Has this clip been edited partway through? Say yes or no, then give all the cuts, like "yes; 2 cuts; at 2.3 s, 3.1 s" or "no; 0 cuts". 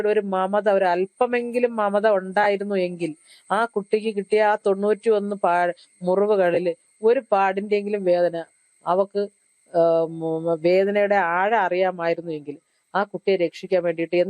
no; 0 cuts